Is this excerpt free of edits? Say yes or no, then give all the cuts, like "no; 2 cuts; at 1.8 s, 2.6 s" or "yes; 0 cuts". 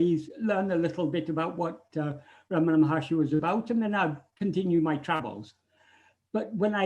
yes; 0 cuts